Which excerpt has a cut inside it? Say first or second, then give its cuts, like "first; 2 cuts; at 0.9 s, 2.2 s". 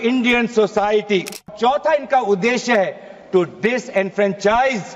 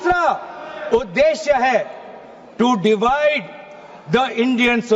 first; 1 cut; at 1.5 s